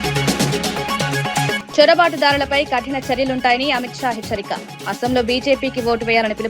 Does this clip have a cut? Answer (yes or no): yes